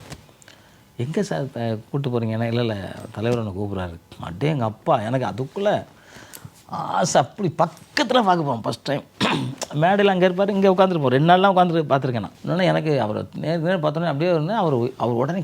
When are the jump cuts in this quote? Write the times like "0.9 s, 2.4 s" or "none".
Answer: 12.3 s